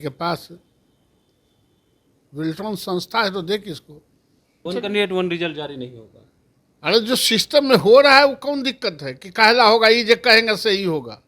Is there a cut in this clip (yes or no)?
yes